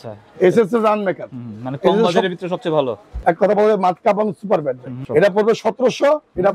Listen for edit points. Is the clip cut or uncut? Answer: cut